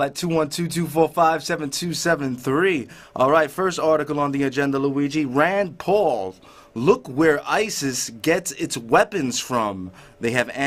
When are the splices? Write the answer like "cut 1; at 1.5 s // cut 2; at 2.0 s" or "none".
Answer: none